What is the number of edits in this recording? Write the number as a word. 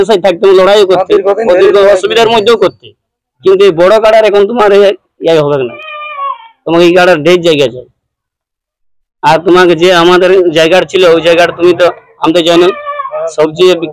zero